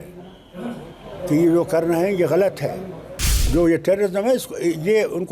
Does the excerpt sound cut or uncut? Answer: cut